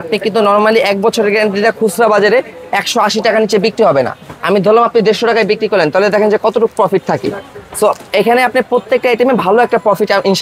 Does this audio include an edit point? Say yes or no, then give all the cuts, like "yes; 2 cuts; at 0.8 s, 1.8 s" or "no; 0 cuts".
no; 0 cuts